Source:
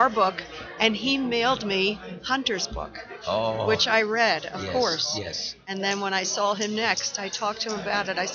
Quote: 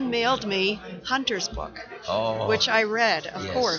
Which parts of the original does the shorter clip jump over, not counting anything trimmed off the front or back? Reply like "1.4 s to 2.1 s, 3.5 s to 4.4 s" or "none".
none